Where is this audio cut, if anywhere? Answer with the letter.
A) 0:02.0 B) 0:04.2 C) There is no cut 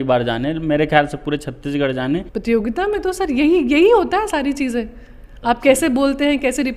A